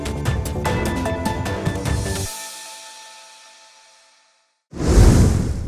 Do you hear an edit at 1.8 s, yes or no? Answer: no